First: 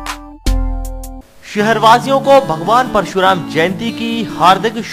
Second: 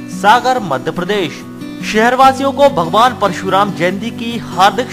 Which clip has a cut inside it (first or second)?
first